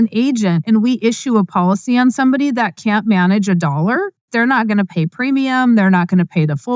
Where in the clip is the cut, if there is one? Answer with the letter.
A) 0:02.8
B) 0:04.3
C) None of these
B